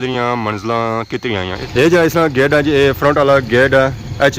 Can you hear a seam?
yes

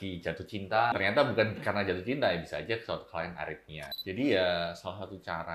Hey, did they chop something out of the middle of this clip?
yes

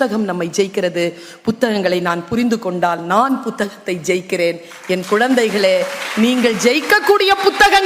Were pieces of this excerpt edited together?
no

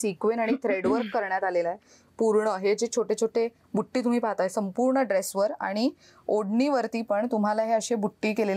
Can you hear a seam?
no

